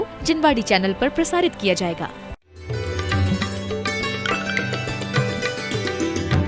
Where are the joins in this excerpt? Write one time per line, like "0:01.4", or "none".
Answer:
0:02.4